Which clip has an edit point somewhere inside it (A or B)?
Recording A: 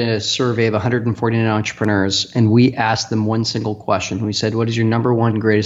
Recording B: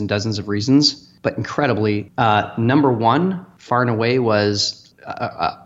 B